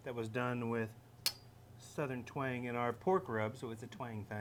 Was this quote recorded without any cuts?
yes; 0 cuts

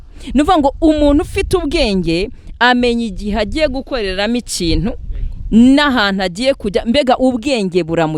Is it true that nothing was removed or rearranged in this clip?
yes; 0 cuts

